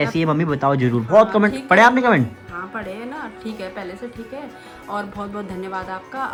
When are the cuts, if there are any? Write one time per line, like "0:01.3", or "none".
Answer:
none